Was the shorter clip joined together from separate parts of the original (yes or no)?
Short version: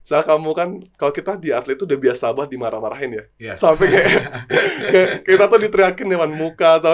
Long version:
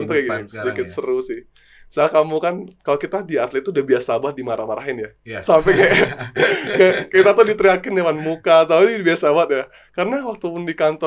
no